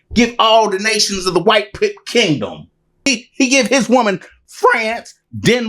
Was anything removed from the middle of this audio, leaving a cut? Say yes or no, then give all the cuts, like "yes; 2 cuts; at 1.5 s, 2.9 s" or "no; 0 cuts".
yes; 1 cut; at 2.9 s